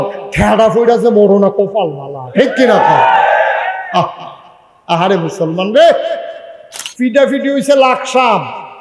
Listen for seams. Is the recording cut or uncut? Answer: cut